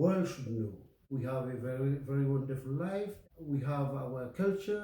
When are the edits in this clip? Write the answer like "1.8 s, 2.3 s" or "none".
1.0 s, 3.2 s